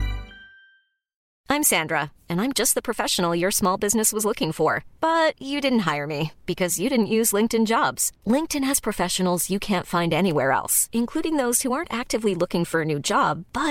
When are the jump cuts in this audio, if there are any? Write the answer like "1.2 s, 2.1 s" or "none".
1.3 s